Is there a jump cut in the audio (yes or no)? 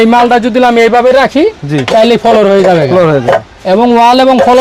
no